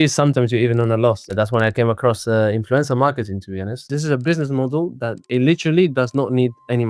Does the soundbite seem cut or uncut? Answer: cut